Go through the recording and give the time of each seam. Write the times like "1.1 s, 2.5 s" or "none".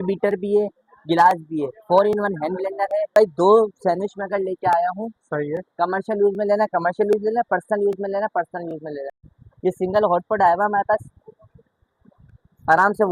3.1 s, 9.2 s